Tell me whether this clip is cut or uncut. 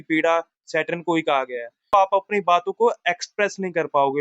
cut